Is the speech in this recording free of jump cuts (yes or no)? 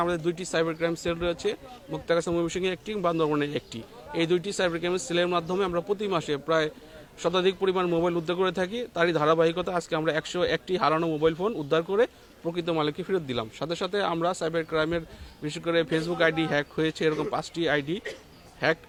yes